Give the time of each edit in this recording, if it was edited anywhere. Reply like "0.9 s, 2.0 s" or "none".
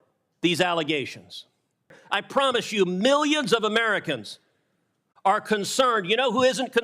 2.0 s